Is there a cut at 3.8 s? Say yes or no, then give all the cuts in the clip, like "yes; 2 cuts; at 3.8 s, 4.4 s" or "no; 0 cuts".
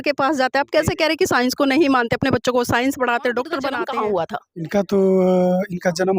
yes; 1 cut; at 3.8 s